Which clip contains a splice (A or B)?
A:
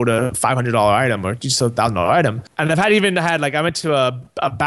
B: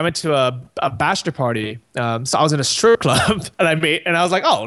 A